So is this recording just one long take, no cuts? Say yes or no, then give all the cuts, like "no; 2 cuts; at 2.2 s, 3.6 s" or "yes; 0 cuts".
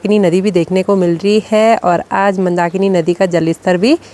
yes; 0 cuts